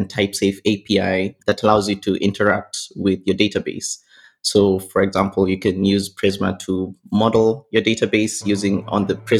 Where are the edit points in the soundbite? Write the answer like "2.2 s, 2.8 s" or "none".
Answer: none